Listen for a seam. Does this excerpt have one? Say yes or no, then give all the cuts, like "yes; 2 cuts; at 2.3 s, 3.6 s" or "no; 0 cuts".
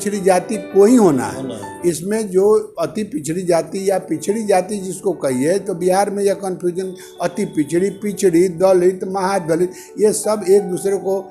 no; 0 cuts